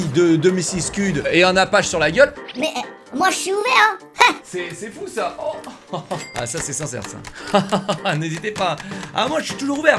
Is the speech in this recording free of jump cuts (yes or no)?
no